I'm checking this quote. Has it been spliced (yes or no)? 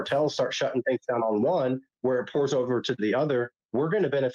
no